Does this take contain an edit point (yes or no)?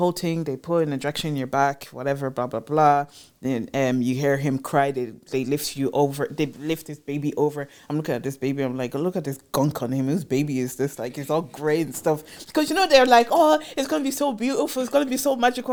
no